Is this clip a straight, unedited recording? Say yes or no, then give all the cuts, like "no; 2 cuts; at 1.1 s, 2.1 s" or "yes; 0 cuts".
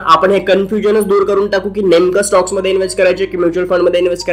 yes; 0 cuts